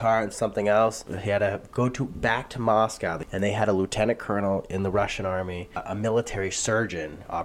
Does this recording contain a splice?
yes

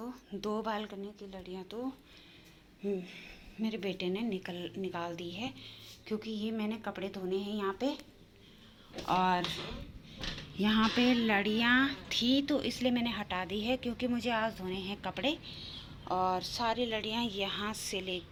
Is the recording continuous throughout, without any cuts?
yes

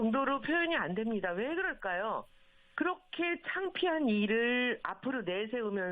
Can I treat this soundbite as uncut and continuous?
no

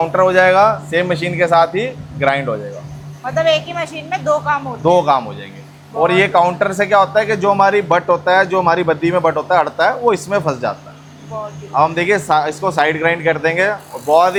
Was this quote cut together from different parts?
no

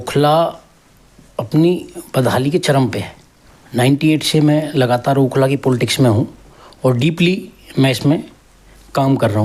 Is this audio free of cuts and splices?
yes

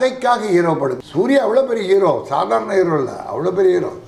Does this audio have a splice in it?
yes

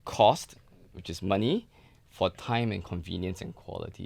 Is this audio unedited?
yes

